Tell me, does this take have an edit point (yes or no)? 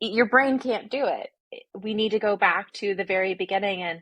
yes